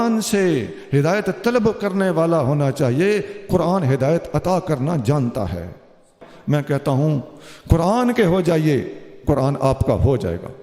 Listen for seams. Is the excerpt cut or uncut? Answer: cut